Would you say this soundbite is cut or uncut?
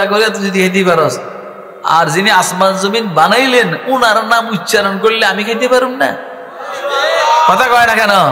uncut